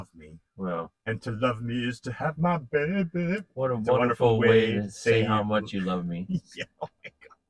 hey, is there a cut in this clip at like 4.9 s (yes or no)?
no